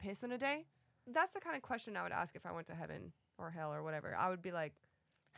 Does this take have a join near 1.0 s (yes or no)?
yes